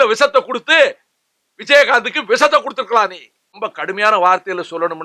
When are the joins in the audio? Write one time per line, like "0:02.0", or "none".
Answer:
0:03.6